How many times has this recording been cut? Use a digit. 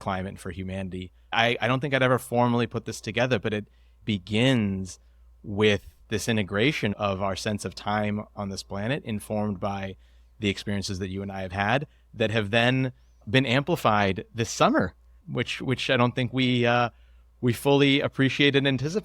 1